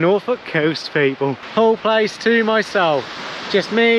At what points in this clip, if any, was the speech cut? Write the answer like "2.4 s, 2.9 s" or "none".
1.4 s